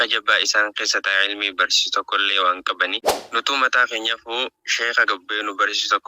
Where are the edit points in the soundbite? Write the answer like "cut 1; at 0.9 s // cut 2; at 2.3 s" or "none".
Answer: cut 1; at 3.1 s